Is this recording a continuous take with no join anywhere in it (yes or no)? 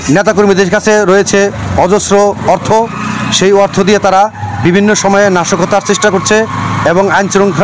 yes